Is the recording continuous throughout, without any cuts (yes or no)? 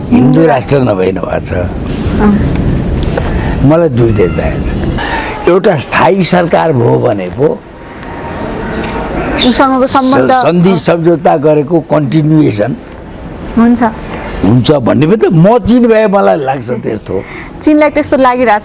no